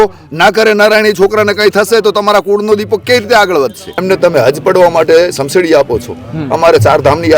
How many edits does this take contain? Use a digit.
1